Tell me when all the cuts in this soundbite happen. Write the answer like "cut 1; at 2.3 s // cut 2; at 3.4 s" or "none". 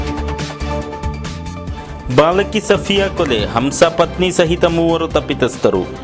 cut 1; at 1.5 s